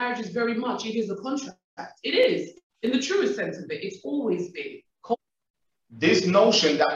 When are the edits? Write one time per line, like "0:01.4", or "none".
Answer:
0:05.1